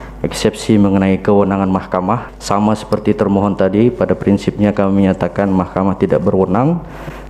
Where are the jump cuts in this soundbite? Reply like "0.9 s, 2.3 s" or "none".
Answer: 2.3 s